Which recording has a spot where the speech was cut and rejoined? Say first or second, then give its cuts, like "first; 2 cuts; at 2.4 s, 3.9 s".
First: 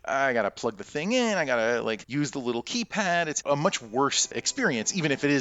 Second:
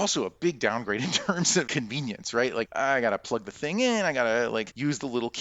second; 1 cut; at 1.7 s